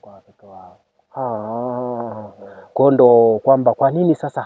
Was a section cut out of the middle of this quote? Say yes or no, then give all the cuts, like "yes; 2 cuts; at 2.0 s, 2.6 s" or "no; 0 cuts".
no; 0 cuts